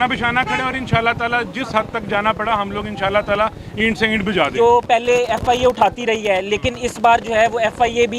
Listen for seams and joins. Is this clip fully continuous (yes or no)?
no